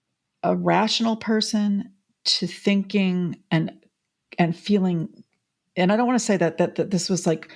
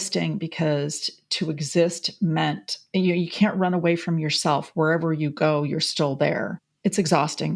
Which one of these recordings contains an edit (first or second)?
second